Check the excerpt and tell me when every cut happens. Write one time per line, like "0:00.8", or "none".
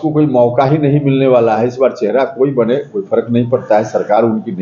none